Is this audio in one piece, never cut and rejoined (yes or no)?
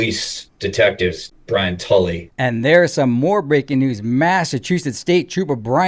no